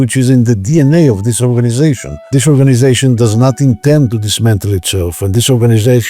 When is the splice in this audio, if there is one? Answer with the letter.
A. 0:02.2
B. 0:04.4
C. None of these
A